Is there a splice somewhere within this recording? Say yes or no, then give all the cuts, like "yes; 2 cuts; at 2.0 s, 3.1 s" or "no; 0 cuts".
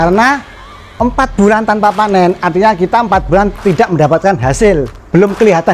no; 0 cuts